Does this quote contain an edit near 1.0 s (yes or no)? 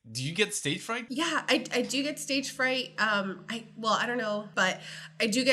yes